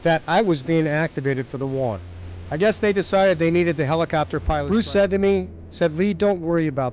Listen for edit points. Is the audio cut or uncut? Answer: cut